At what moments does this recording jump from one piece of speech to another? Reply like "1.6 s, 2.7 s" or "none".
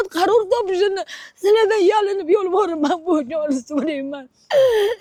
none